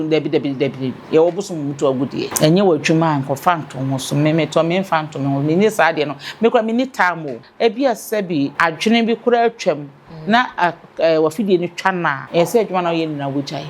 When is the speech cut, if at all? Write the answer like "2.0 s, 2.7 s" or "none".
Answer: 2.3 s, 7.4 s, 8.5 s, 12.2 s